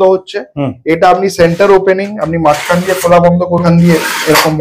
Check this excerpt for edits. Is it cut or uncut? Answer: cut